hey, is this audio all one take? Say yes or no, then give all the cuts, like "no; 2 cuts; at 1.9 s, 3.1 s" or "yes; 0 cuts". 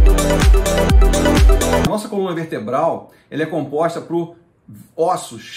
no; 1 cut; at 1.9 s